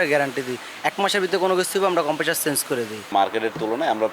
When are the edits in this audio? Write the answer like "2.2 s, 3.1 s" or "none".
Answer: 3.1 s